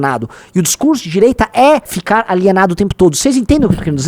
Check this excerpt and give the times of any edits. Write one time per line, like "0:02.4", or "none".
0:01.9